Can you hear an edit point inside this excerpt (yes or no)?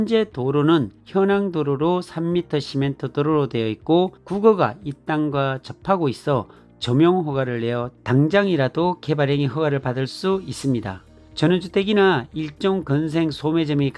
no